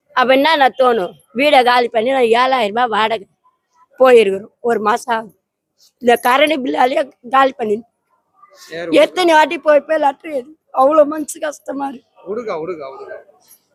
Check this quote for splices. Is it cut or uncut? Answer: uncut